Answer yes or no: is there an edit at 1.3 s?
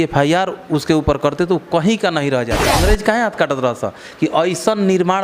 no